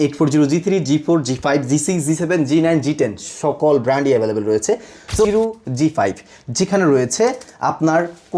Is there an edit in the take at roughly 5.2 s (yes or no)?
yes